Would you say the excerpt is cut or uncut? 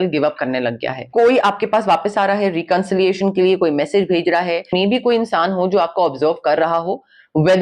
cut